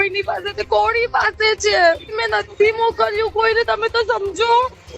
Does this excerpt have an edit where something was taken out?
yes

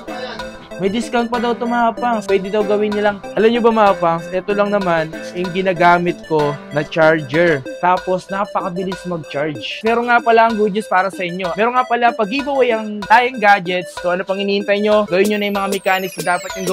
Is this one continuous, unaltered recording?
no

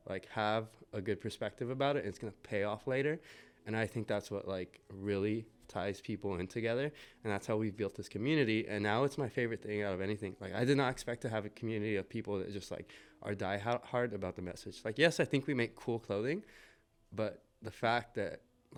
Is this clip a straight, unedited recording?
yes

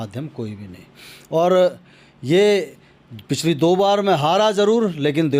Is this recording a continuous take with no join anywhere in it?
yes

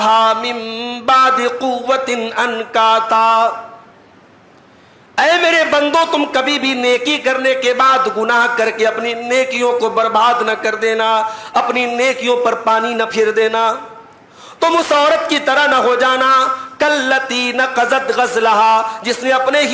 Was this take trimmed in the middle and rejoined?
no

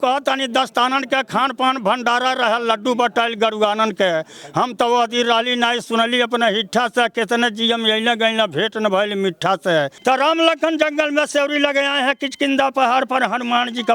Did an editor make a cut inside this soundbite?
yes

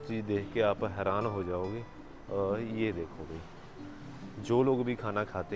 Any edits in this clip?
no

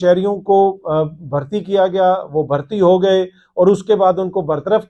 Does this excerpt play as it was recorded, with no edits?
yes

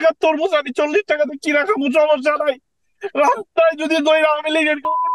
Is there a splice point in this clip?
no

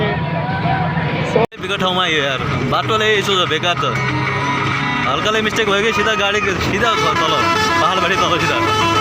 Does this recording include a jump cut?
yes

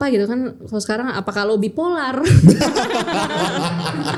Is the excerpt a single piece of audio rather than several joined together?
yes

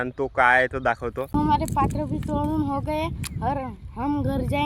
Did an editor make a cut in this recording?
yes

